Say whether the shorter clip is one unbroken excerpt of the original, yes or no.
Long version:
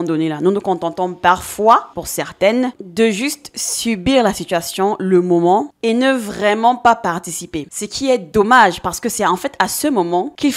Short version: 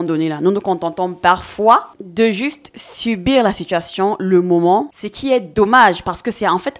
no